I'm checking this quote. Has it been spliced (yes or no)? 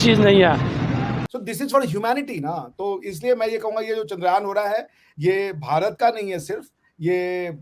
yes